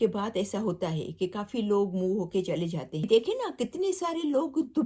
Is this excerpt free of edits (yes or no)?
no